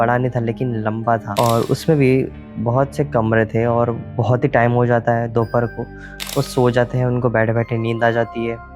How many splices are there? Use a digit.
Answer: 1